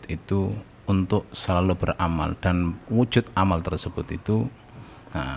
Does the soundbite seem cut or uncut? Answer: uncut